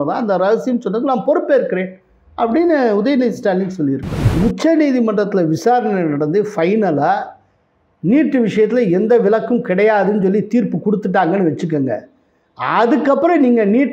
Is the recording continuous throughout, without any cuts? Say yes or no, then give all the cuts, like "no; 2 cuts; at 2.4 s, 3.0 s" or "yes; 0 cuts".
no; 1 cut; at 4.2 s